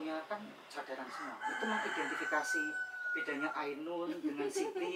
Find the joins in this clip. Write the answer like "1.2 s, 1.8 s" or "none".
none